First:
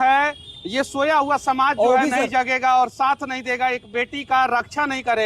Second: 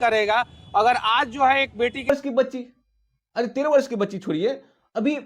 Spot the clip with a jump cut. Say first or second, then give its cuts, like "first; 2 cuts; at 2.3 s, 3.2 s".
second; 1 cut; at 2.1 s